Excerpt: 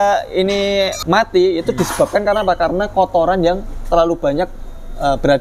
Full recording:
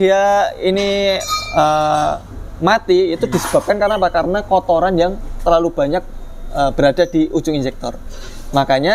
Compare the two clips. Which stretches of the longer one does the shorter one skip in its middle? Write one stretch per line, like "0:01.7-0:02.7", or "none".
0:01.3-0:02.5